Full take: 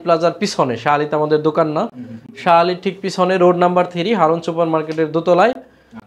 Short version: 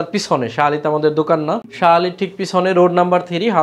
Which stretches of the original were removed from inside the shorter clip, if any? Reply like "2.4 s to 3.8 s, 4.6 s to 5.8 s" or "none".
2.0 s to 2.3 s